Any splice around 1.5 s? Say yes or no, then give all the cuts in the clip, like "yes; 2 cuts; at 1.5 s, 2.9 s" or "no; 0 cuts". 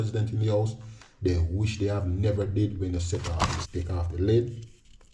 no; 1 cut; at 3.6 s